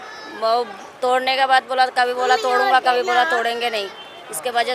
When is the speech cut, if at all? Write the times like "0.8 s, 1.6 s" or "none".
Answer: none